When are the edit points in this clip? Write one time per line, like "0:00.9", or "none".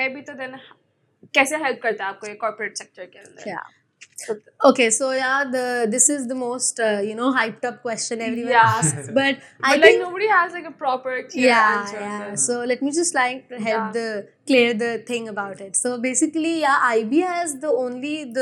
none